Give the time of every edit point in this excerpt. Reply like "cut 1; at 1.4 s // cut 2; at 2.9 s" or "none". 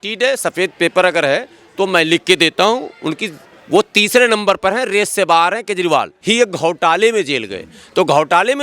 cut 1; at 6.1 s